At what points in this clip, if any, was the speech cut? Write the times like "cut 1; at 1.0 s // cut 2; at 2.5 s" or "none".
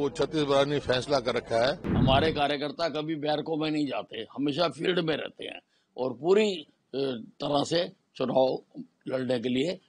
cut 1; at 1.9 s